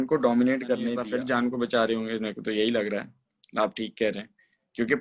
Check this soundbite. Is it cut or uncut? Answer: cut